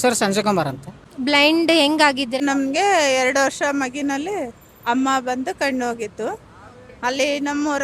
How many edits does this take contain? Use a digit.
2